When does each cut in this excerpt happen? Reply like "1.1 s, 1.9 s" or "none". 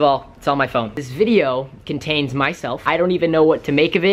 1.0 s, 2.9 s